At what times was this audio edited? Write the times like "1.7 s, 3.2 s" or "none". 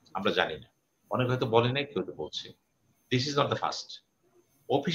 none